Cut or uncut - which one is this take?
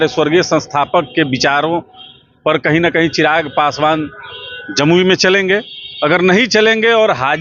uncut